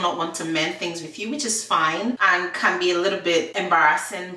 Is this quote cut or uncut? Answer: cut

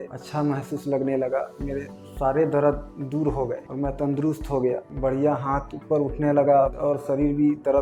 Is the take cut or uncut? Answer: uncut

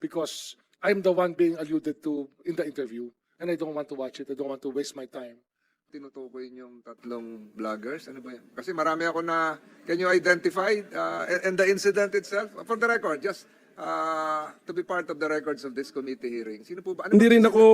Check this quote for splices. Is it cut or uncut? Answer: cut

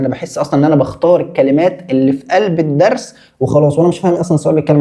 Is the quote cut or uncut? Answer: uncut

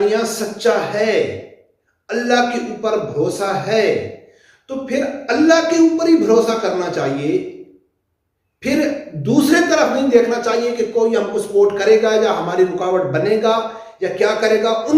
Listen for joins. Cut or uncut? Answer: uncut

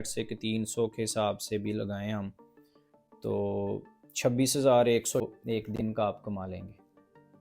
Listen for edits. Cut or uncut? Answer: cut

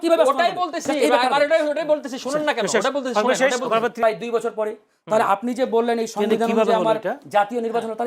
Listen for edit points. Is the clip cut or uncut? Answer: cut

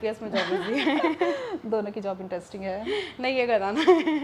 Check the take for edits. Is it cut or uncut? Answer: uncut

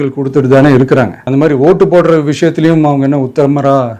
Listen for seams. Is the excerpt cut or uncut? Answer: cut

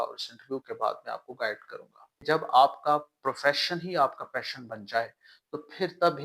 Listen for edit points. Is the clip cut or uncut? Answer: cut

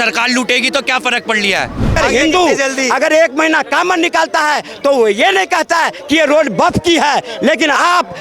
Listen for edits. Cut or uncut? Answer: cut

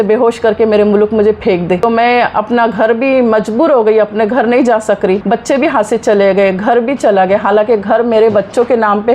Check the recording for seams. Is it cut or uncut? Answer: cut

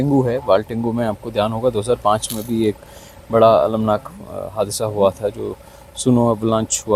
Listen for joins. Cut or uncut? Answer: uncut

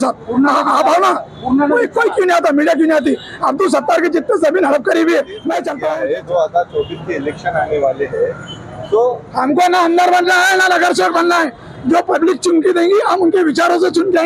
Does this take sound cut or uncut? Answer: cut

